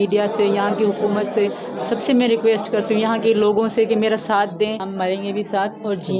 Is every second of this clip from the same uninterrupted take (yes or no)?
no